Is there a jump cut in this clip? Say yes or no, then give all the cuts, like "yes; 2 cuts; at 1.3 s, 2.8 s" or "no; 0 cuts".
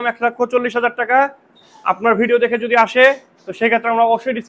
no; 0 cuts